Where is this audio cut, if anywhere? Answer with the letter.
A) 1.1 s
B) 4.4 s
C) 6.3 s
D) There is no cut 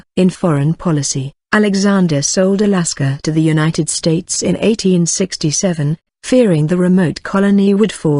A